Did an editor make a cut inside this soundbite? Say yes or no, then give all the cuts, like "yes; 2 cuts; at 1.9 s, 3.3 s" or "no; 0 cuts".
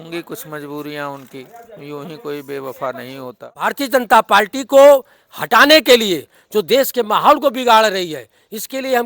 yes; 1 cut; at 3.7 s